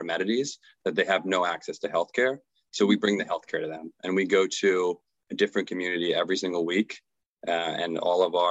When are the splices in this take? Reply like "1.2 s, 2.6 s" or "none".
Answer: none